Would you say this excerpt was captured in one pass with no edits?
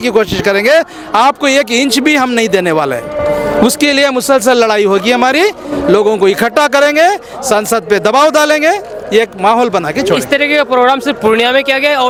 yes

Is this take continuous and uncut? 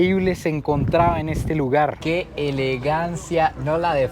no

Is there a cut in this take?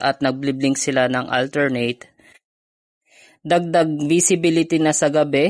no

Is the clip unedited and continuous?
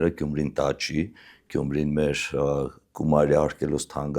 yes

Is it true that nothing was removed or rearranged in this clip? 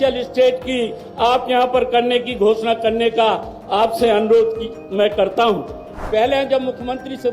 no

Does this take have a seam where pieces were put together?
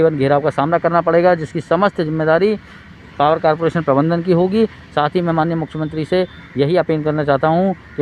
no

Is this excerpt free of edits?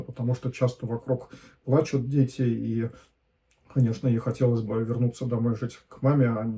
yes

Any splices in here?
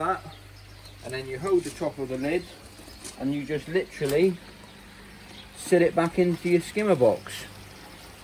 no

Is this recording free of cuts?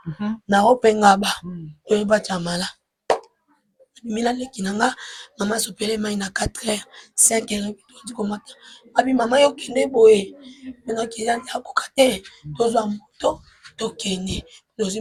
yes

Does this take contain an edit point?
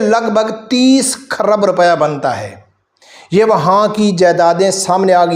no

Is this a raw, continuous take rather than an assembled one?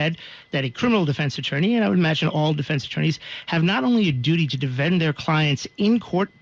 yes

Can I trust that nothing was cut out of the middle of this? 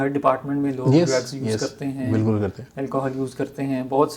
yes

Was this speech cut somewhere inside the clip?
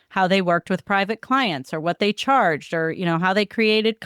no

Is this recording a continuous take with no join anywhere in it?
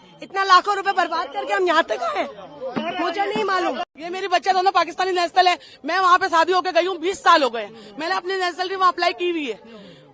yes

